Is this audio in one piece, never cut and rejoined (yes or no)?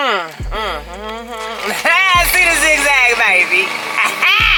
yes